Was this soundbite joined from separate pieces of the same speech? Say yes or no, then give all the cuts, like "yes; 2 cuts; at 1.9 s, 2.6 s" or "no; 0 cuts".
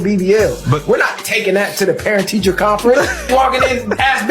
yes; 1 cut; at 2.3 s